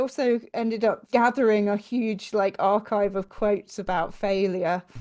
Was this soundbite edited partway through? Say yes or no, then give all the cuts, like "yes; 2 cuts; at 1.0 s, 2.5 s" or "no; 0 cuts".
yes; 1 cut; at 1.1 s